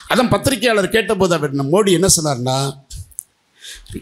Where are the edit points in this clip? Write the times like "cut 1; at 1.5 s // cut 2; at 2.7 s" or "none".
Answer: none